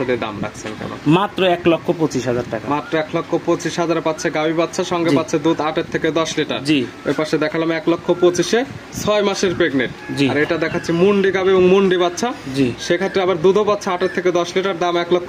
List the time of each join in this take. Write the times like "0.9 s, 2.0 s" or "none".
none